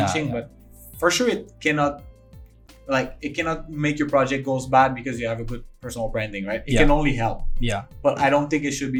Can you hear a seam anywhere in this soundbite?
no; 0 cuts

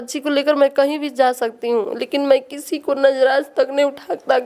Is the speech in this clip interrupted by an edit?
no; 0 cuts

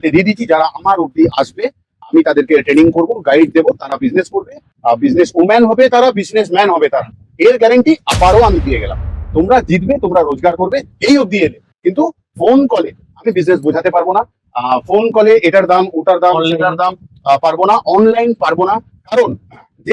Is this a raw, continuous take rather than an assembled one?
yes; 0 cuts

